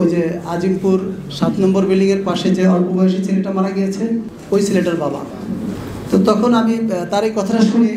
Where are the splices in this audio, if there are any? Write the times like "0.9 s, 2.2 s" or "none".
none